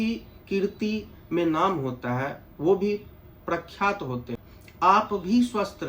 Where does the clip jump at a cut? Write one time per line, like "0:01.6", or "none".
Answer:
0:04.4